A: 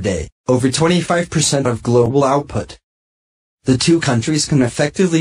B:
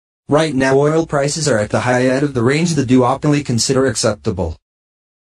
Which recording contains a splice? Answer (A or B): B